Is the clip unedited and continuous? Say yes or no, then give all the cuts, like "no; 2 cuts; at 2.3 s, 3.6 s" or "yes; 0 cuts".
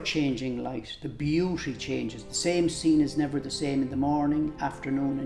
yes; 0 cuts